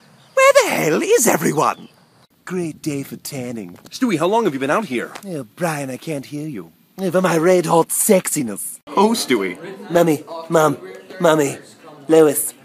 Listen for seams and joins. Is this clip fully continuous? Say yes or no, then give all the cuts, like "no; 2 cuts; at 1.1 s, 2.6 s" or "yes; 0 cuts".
no; 1 cut; at 6.0 s